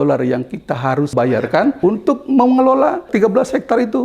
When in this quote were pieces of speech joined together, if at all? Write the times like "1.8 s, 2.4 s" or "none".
1.5 s, 3.1 s